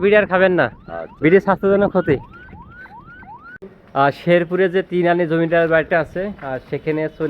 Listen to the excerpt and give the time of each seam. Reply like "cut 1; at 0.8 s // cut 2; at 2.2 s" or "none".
cut 1; at 3.5 s